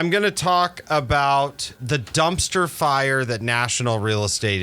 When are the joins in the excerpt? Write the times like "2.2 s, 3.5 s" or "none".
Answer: 1.7 s

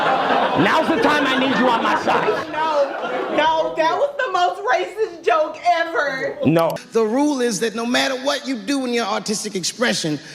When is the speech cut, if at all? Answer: 6.8 s

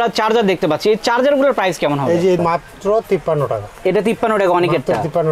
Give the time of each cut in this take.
2.4 s

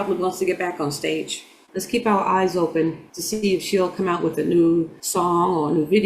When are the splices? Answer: 5.0 s

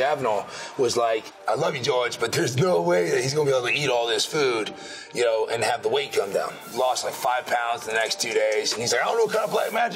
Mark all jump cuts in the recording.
1.3 s, 6.6 s

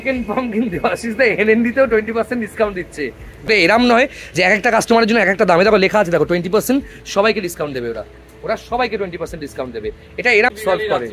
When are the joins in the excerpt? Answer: 3.5 s, 10.2 s

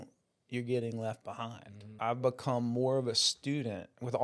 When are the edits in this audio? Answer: 2.0 s

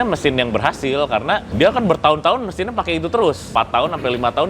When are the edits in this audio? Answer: 1.5 s, 3.5 s

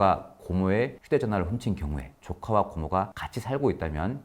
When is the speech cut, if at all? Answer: 2.1 s

